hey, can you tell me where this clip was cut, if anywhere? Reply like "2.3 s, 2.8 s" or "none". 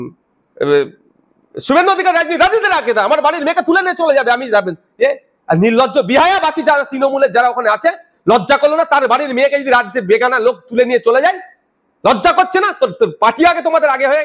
none